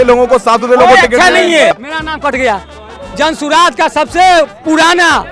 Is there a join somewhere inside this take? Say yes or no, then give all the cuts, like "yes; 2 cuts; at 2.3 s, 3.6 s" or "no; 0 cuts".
yes; 1 cut; at 1.8 s